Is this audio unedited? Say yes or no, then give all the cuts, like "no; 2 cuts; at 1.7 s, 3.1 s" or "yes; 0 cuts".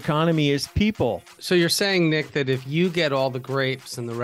no; 1 cut; at 1.4 s